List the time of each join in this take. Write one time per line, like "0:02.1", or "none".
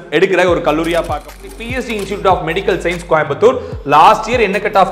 0:01.4